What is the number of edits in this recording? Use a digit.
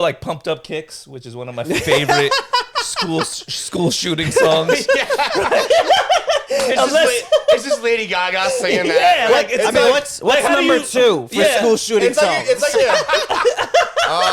0